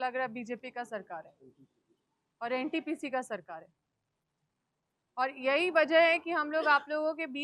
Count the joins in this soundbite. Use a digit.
0